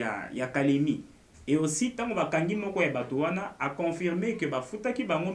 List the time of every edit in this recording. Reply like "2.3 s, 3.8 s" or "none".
none